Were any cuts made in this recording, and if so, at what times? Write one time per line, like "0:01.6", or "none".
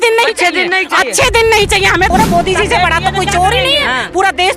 0:02.1